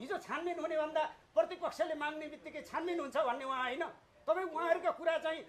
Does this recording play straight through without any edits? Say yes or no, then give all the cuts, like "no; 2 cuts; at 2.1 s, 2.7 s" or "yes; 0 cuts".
yes; 0 cuts